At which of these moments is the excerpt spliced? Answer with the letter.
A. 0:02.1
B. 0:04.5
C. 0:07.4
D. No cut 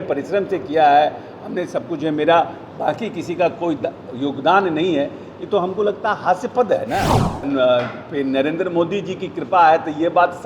C